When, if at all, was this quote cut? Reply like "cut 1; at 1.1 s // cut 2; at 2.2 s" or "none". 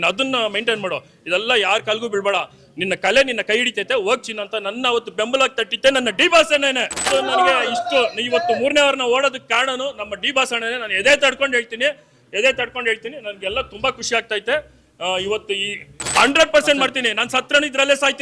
cut 1; at 7.1 s // cut 2; at 15.9 s